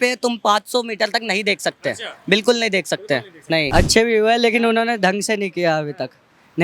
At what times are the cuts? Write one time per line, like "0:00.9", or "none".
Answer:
0:03.7